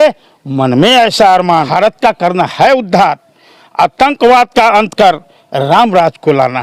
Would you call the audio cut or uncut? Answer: cut